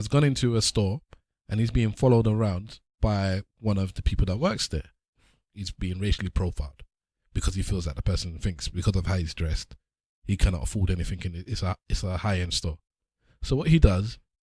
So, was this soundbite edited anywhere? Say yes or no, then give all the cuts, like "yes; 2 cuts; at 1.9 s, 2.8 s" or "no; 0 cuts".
yes; 1 cut; at 5.2 s